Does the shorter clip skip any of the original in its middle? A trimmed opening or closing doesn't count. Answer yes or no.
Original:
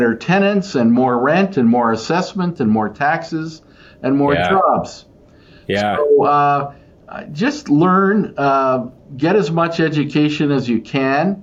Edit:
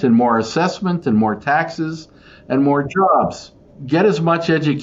yes